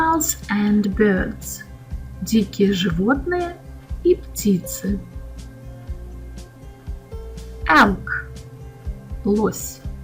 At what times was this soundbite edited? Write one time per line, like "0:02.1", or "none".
none